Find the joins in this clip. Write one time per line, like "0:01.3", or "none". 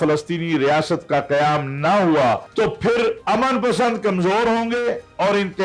0:02.5
0:03.2